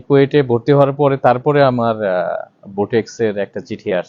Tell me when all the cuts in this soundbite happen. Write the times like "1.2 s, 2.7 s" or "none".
none